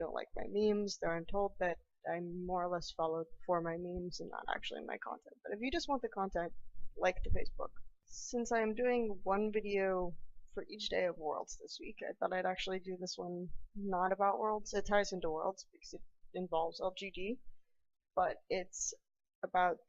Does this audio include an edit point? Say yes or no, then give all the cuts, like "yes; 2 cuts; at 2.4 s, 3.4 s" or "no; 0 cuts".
no; 0 cuts